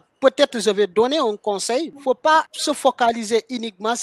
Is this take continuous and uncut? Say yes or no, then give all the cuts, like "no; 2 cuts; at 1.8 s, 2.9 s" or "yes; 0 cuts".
no; 1 cut; at 1.9 s